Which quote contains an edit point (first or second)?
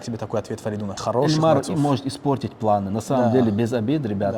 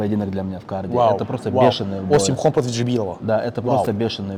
first